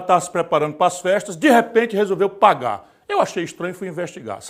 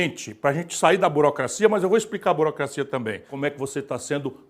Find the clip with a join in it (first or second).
second